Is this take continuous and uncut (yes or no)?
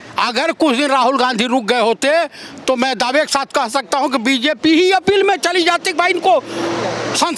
yes